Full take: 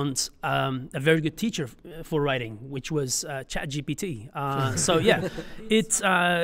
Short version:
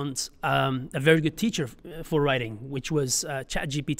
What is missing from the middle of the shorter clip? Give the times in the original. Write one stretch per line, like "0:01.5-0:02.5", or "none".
none